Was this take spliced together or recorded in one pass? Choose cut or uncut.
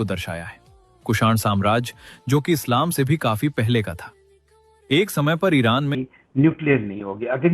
cut